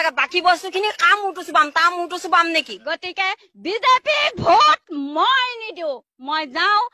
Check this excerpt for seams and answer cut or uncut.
cut